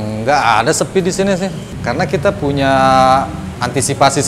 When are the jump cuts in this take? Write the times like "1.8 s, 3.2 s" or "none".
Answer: 1.7 s